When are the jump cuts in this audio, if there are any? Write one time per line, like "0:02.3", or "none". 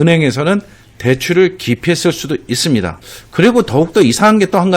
0:02.9

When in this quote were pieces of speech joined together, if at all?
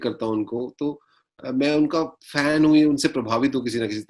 none

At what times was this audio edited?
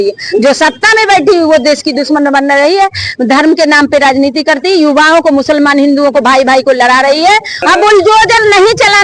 0:07.6

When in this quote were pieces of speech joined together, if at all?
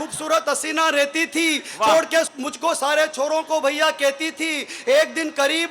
0:02.4

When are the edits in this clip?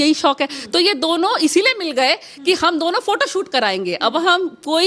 none

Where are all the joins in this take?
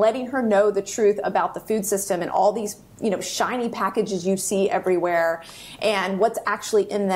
none

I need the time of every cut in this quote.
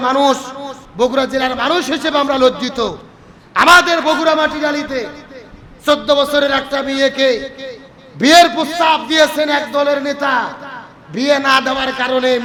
none

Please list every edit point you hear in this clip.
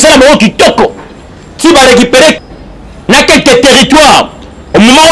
0:02.4

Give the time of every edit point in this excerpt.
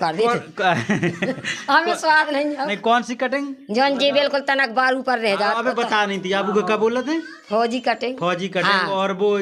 none

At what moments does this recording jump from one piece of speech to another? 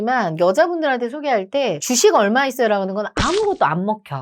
none

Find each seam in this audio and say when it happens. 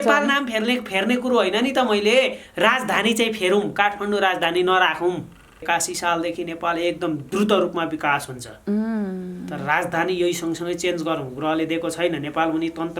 0:05.6

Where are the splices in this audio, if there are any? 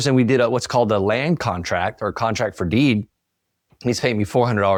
none

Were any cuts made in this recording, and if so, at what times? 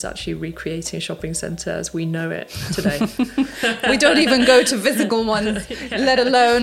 none

